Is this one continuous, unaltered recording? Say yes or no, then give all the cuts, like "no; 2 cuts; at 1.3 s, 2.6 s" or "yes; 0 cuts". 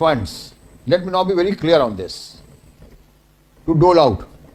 yes; 0 cuts